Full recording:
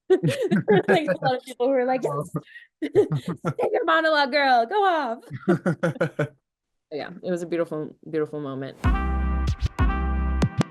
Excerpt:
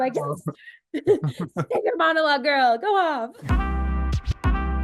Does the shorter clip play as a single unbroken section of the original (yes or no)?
no